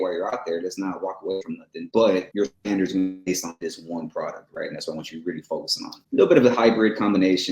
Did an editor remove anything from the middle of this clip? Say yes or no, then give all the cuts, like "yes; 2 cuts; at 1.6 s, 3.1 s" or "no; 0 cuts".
yes; 3 cuts; at 1.8 s, 2.3 s, 6.0 s